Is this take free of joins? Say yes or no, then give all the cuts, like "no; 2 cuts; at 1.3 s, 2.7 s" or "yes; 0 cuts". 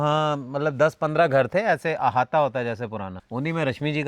no; 1 cut; at 3.2 s